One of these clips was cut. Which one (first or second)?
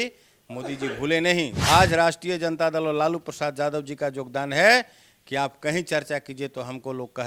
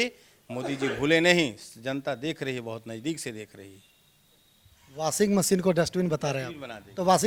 first